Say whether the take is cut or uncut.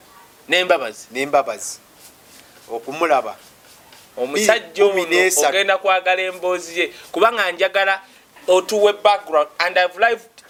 uncut